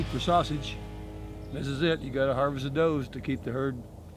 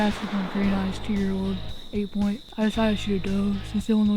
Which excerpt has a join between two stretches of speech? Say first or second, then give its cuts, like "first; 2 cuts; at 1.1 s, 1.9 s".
second; 1 cut; at 2.5 s